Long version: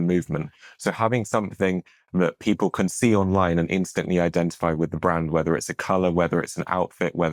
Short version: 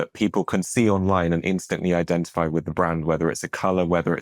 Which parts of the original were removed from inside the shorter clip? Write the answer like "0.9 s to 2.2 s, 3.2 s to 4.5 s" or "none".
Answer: none